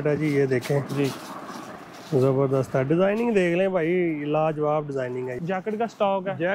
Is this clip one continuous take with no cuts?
no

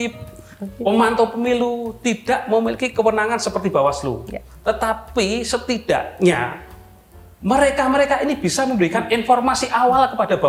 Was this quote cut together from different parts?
no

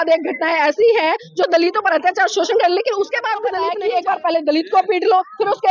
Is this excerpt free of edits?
no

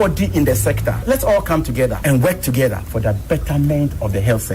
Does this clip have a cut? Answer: yes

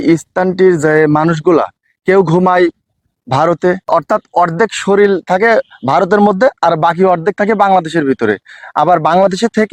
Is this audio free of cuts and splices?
yes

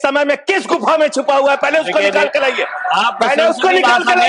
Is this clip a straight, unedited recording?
yes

